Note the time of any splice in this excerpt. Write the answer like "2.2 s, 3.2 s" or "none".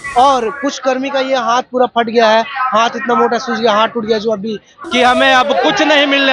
4.7 s